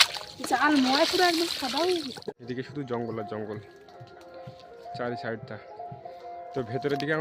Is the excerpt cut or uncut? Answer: cut